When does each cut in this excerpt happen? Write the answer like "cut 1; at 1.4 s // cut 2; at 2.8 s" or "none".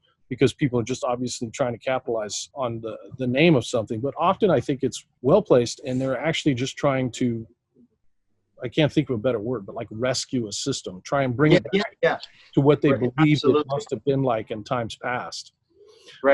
cut 1; at 2.4 s // cut 2; at 5.1 s